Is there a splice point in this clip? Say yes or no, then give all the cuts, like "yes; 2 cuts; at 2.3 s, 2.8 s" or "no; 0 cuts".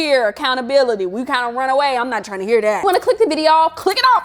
no; 0 cuts